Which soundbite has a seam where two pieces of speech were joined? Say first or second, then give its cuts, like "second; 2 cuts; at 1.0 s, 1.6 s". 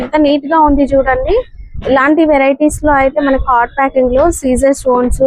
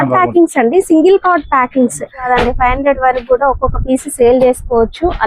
second; 1 cut; at 2.2 s